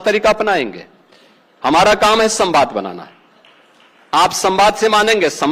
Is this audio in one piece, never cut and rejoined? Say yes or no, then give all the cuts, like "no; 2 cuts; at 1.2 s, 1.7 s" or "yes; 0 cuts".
yes; 0 cuts